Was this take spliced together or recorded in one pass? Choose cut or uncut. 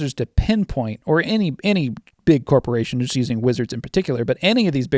uncut